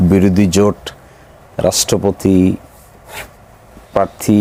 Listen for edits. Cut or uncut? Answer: uncut